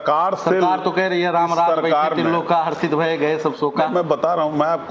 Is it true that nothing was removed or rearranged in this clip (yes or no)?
yes